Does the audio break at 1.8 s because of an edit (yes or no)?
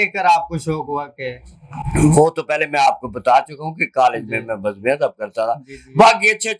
no